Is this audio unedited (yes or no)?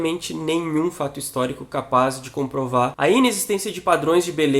no